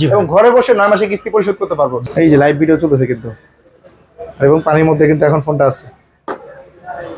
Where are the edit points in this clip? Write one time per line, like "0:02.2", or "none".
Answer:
0:02.0